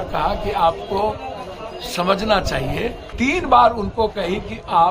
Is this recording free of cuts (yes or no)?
no